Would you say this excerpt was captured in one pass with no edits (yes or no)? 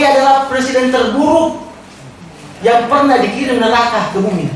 yes